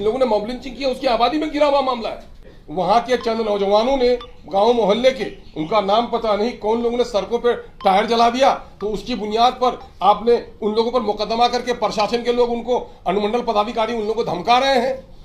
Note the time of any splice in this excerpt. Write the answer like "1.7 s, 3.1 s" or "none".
2.6 s